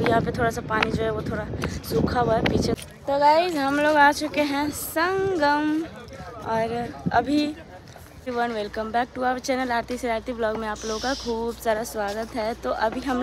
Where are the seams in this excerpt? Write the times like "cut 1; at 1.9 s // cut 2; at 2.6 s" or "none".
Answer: cut 1; at 2.8 s // cut 2; at 8.3 s